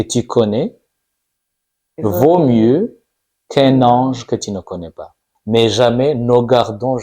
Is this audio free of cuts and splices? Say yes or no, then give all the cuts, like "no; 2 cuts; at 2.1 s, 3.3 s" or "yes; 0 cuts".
no; 1 cut; at 5.3 s